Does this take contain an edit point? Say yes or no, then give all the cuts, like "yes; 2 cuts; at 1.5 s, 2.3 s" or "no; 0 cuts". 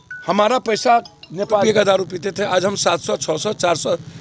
yes; 1 cut; at 1.6 s